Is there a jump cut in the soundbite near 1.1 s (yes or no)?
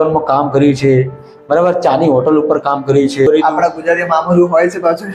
no